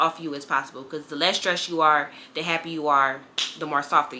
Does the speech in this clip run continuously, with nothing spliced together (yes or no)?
yes